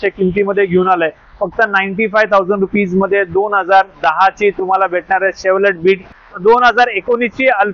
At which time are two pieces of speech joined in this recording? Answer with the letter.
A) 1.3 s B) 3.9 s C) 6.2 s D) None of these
C